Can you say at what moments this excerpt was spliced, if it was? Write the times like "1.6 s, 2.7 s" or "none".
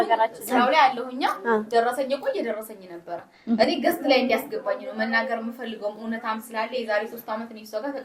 none